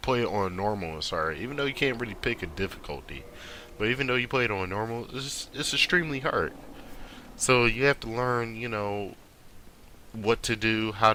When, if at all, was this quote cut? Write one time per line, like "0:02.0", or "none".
none